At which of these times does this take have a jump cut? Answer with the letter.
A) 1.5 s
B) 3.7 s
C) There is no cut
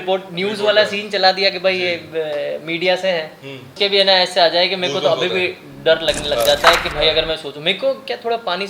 B